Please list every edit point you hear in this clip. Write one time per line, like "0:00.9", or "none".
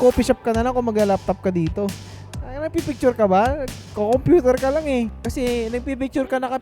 0:05.2

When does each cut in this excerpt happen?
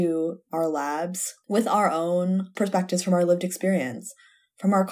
0:01.3
0:02.5

